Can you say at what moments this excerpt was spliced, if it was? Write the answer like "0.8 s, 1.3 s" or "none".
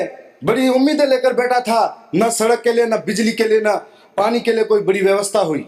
none